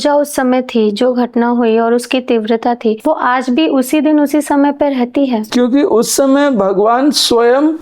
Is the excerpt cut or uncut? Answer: cut